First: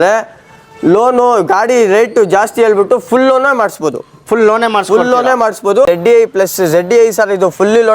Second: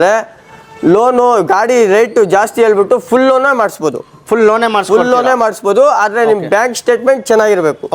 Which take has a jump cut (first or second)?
first